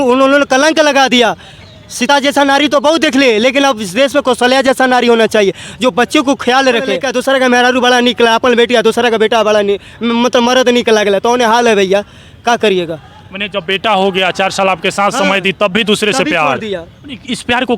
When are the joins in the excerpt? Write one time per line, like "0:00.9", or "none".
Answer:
0:07.0